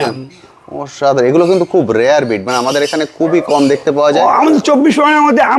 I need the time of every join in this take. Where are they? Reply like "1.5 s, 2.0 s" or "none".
none